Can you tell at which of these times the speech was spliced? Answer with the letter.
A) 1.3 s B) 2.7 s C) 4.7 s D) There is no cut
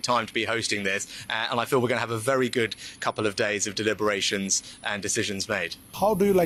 D